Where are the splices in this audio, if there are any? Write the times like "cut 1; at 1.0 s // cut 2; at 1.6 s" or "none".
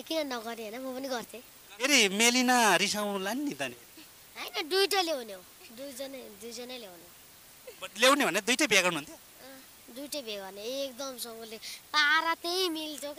cut 1; at 1.8 s